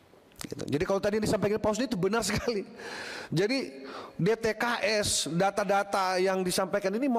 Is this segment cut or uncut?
uncut